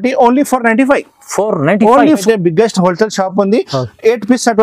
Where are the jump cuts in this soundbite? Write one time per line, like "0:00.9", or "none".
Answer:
0:02.2